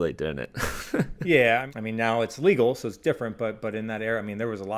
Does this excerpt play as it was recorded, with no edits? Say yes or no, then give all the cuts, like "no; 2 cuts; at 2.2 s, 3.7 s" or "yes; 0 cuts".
no; 2 cuts; at 1.1 s, 1.7 s